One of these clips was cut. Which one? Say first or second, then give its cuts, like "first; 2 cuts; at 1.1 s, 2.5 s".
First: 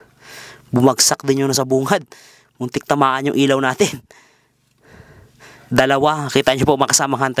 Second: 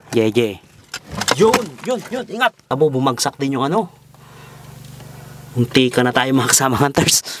second; 1 cut; at 2.6 s